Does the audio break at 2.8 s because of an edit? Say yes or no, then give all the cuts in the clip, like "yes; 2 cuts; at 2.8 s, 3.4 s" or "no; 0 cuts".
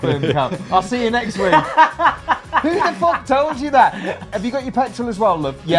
no; 1 cut; at 4.3 s